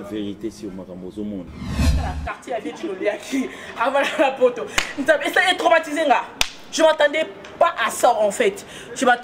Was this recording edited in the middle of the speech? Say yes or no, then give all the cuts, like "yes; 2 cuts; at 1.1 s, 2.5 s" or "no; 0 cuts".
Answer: no; 0 cuts